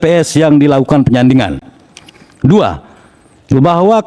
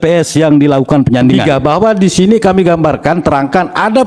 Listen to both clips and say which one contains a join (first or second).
second